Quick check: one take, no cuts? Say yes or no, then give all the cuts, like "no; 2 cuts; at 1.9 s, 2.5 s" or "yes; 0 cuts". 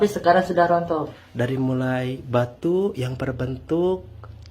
no; 1 cut; at 1.1 s